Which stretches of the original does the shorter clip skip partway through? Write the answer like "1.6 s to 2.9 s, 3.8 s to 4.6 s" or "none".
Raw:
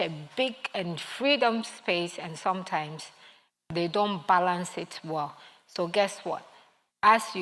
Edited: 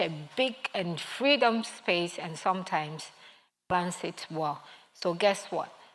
3.7 s to 4.5 s